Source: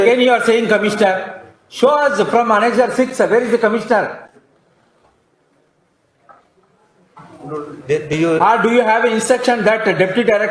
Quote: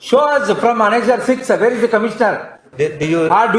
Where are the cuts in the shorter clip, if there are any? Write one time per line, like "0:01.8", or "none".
0:02.6